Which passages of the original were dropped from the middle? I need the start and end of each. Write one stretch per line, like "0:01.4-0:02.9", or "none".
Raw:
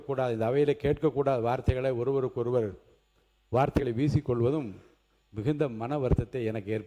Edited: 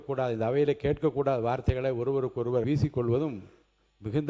0:02.6-0:04.0